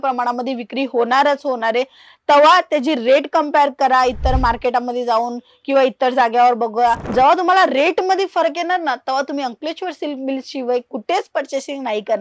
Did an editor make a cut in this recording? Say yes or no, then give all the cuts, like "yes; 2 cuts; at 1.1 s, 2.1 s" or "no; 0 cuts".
no; 0 cuts